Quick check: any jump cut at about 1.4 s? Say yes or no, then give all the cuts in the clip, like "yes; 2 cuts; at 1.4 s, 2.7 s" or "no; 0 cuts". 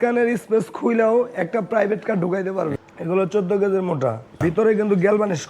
no; 2 cuts; at 2.8 s, 4.4 s